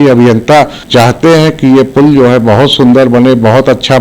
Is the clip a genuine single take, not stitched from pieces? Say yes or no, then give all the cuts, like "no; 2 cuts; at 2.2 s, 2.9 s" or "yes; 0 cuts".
yes; 0 cuts